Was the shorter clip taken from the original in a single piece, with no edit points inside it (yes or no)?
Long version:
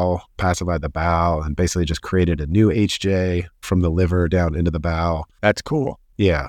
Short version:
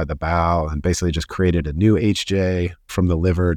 yes